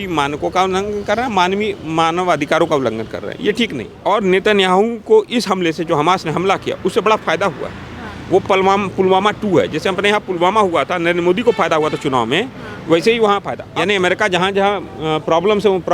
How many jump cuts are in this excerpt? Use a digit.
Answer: 2